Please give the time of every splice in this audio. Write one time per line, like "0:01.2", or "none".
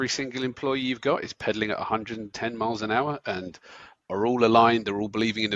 none